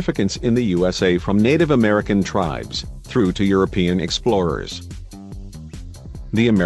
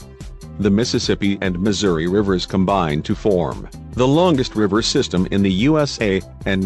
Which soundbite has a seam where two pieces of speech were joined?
second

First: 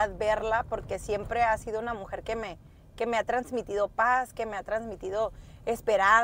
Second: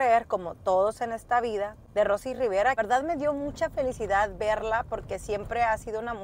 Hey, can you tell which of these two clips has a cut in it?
second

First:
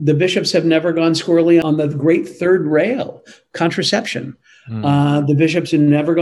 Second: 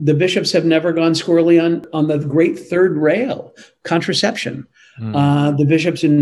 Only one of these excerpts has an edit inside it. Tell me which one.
first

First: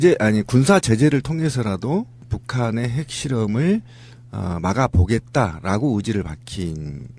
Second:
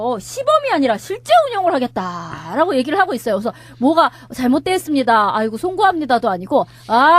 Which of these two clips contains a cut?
first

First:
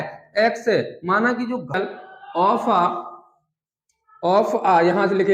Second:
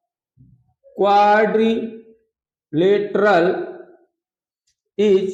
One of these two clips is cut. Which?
first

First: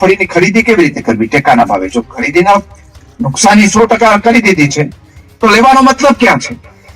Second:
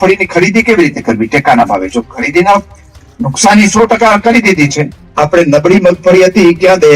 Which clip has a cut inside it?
second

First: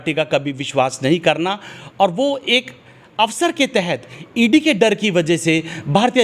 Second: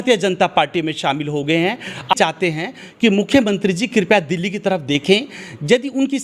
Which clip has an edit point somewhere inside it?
second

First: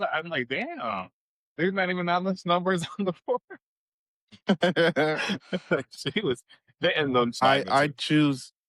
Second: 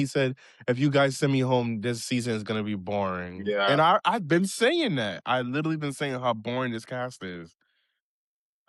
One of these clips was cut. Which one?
first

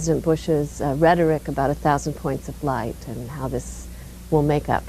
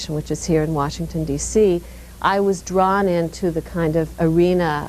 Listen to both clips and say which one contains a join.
second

